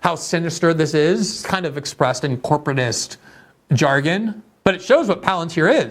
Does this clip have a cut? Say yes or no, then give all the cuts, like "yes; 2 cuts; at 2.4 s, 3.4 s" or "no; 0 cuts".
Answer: yes; 1 cut; at 4.5 s